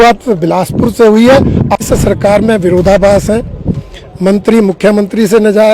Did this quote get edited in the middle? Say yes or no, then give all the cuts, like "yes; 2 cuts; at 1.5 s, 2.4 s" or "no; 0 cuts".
yes; 1 cut; at 1.8 s